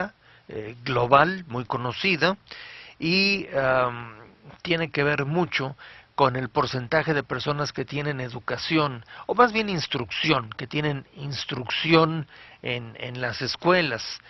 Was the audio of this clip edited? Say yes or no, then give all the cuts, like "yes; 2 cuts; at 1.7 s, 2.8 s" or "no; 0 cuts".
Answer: yes; 1 cut; at 6.7 s